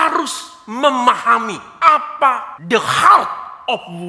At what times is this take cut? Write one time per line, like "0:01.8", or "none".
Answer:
0:01.6
0:02.5